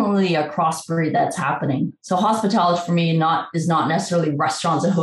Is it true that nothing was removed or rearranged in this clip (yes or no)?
yes